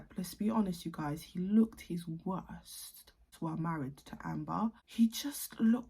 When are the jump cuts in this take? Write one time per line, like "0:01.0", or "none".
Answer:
0:03.3
0:04.6